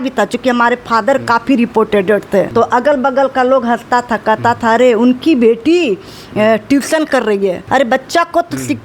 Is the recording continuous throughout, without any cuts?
no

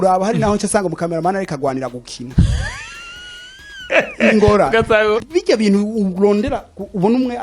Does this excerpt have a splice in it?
yes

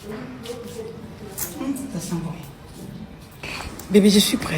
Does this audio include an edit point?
yes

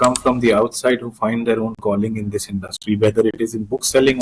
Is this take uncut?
yes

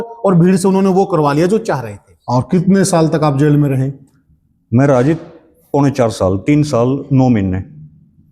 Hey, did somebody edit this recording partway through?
yes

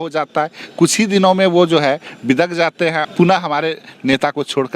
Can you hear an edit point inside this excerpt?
yes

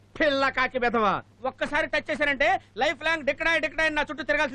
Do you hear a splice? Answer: no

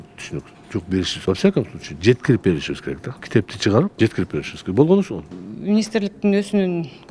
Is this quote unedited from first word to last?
no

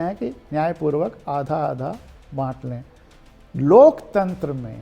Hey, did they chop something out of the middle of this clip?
yes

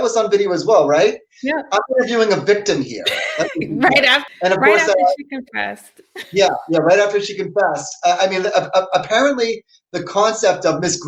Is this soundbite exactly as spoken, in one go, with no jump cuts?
yes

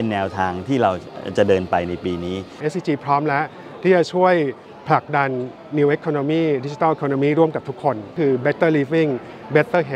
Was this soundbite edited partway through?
yes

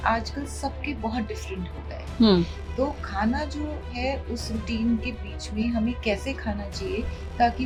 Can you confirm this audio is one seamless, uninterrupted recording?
yes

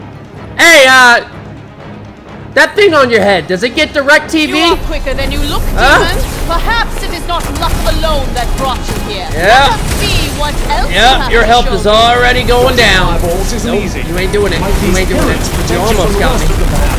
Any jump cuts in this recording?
no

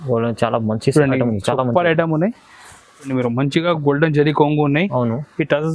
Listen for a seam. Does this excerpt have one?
yes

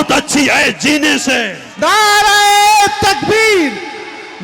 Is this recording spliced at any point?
no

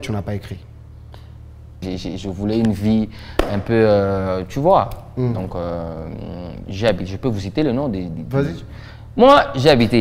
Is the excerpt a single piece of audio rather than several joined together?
no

